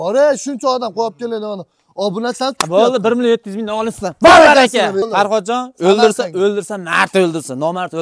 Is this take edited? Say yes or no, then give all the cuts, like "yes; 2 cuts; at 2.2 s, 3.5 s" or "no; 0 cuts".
yes; 1 cut; at 5.1 s